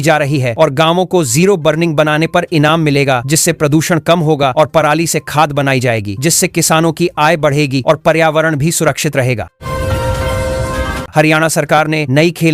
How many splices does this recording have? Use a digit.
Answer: 2